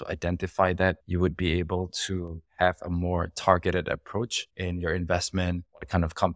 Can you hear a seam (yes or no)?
no